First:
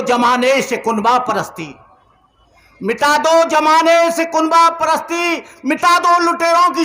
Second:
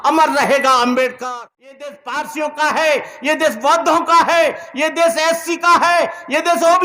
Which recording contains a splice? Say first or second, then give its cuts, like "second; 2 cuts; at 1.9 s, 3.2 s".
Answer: second; 1 cut; at 1.2 s